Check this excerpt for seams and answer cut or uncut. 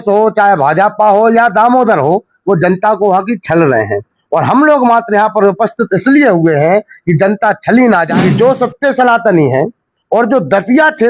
cut